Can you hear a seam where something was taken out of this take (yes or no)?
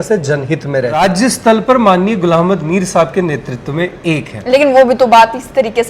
yes